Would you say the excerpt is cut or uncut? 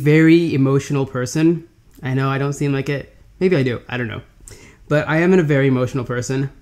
uncut